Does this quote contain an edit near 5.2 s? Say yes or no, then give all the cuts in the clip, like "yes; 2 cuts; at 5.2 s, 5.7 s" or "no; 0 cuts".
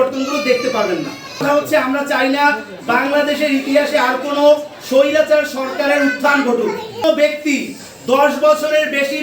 no; 2 cuts; at 1.4 s, 7.0 s